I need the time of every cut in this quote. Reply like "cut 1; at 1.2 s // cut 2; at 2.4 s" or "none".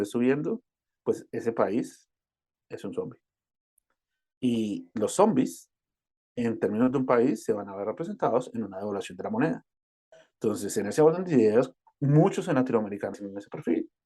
cut 1; at 13.2 s